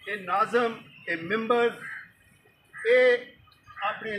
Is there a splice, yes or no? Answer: no